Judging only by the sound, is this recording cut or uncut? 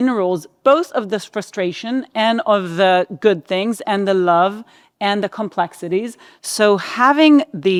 uncut